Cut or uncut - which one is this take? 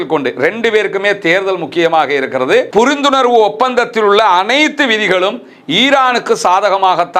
cut